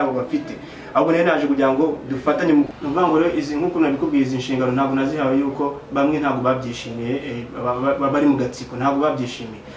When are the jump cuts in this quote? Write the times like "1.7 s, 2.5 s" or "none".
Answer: 2.7 s